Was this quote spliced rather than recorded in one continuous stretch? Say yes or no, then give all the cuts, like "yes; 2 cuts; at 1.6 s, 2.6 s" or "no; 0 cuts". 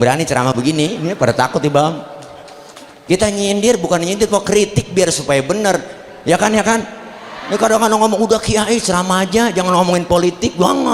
no; 0 cuts